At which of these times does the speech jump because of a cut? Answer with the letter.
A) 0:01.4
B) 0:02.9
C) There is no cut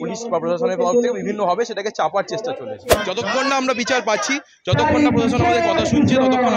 B